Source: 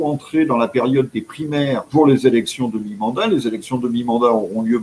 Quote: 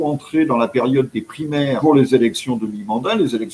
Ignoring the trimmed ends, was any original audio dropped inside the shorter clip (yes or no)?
yes